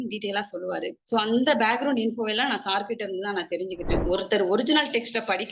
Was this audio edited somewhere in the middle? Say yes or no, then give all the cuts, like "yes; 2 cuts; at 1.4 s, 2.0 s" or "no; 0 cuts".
yes; 1 cut; at 3.9 s